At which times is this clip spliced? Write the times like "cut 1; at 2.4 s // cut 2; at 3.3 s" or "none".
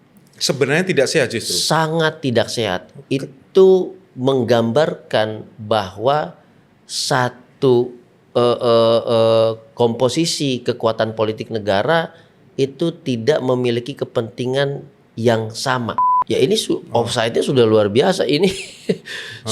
cut 1; at 16.1 s